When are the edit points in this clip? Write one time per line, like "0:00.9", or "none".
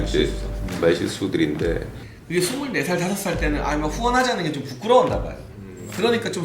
0:01.9

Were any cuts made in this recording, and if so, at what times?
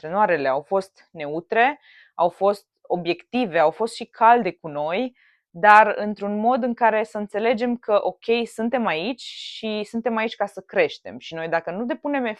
none

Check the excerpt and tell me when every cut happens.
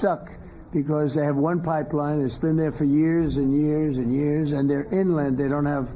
0:04.3

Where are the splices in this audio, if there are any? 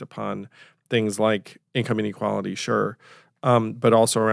0:01.6

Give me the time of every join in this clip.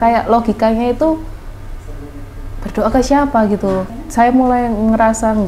0:03.9

